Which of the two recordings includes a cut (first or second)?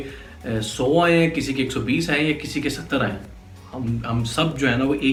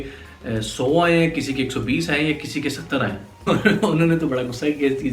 second